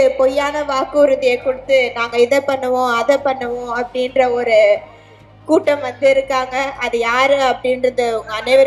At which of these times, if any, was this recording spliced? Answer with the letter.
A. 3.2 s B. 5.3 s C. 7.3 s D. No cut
D